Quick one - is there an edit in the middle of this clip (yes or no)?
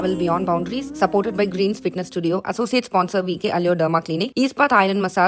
no